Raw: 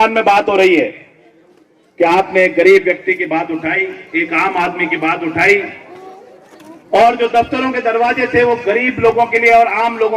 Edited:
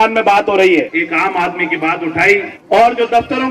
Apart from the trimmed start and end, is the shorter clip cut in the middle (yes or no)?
yes